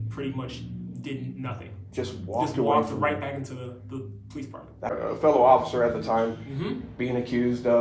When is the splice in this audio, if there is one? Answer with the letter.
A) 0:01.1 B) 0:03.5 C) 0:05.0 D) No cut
C